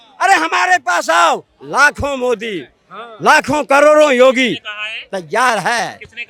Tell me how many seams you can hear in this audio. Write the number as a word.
zero